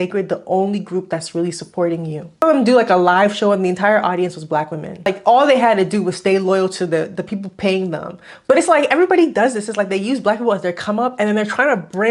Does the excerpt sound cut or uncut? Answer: cut